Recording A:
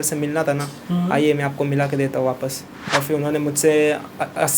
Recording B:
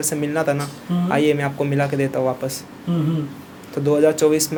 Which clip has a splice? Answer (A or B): A